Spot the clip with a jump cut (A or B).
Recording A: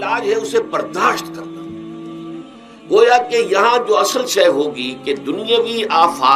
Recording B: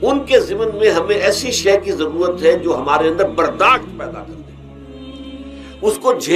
A